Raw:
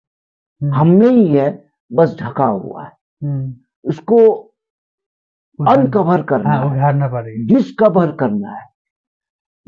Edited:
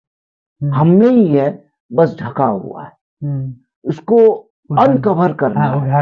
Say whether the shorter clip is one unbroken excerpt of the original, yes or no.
no